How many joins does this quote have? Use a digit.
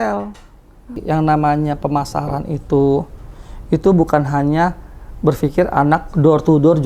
1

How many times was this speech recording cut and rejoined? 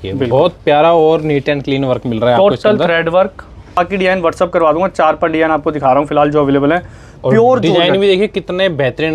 1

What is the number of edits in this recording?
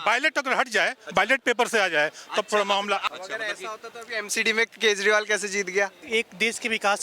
2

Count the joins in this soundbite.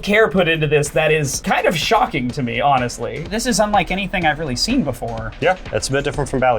2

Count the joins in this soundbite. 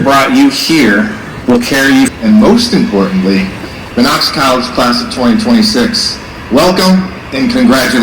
1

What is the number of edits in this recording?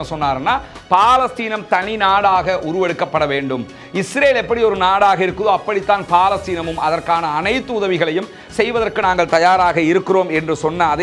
0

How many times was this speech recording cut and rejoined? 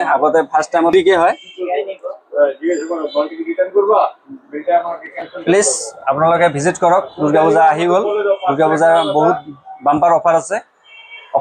1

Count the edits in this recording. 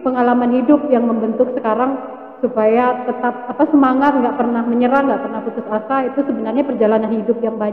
0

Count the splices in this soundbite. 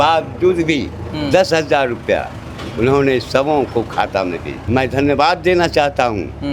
1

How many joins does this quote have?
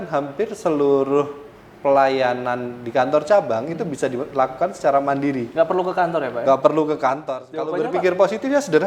1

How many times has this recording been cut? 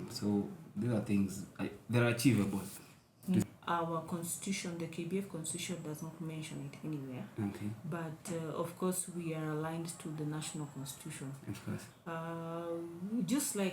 1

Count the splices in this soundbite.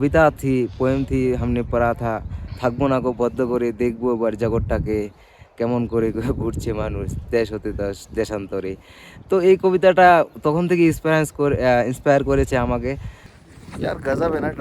1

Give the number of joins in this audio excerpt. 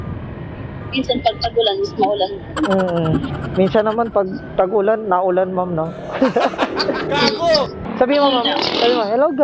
1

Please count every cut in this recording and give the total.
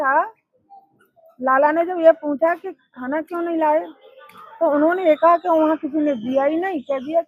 0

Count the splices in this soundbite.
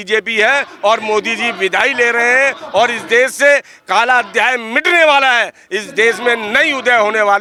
0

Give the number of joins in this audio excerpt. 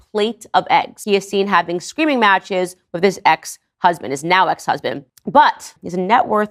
0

